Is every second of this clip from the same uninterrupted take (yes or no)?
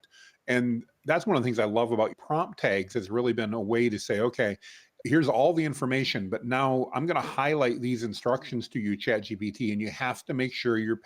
no